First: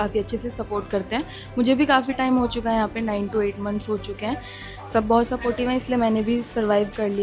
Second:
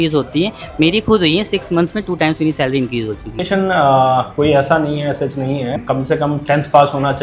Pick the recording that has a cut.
second; 2 cuts; at 3.4 s, 5.8 s

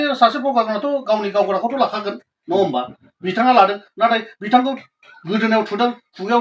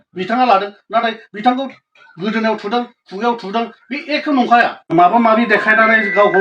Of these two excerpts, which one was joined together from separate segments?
second; 1 cut; at 4.8 s

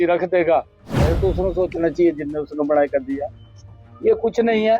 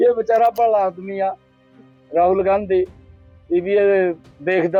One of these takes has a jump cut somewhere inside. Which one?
first; 1 cut; at 0.9 s

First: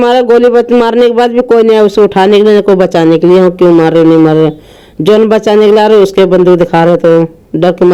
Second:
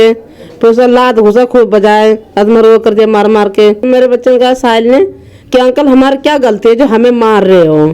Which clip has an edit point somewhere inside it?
second; 1 cut; at 3.9 s

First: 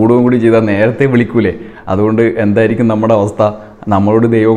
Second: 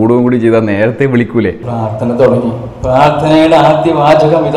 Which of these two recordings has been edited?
second; 1 cut; at 1.7 s

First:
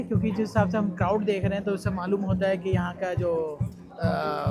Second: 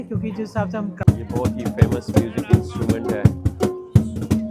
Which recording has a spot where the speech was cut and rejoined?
second; 1 cut; at 1.0 s

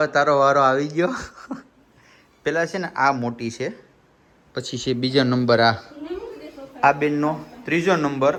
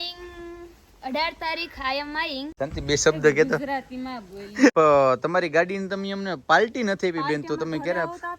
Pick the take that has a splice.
second; 2 cuts; at 2.5 s, 4.7 s

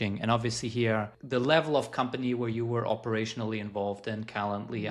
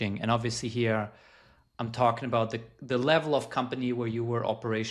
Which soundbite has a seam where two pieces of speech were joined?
first; 1 cut; at 1.2 s

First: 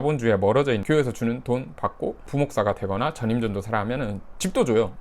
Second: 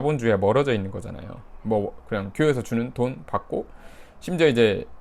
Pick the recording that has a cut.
first; 2 cuts; at 0.8 s, 2.3 s

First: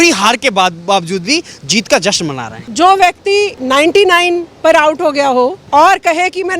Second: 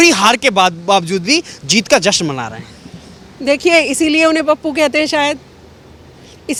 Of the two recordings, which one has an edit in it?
first; 3 cuts; at 2.6 s, 3.6 s, 5.6 s

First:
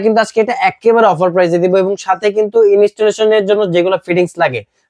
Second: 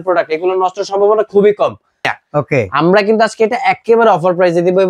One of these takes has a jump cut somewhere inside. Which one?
second; 1 cut; at 2.1 s

